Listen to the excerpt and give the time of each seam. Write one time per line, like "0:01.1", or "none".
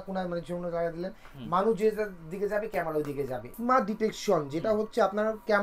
0:03.5